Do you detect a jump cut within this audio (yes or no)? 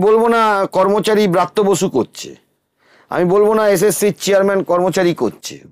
no